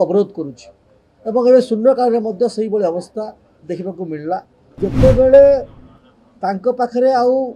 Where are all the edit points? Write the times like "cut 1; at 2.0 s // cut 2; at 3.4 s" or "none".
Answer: cut 1; at 4.8 s